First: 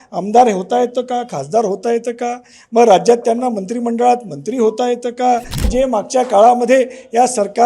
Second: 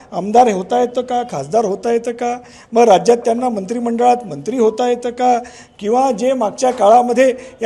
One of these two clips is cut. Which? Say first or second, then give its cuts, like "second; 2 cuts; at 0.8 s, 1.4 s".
first; 1 cut; at 5.7 s